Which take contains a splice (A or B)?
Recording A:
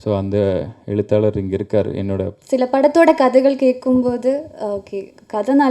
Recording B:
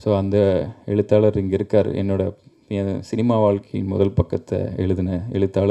A